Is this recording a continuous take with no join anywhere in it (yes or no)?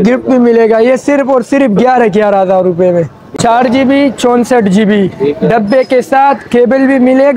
no